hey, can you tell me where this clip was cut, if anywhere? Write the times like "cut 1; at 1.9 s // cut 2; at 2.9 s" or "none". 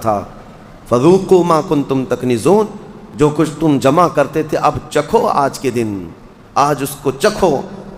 none